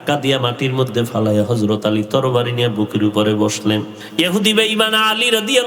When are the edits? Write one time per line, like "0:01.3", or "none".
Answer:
0:04.0